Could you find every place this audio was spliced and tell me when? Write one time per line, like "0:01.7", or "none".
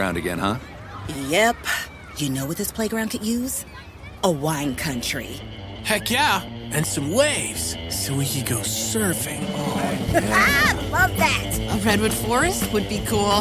none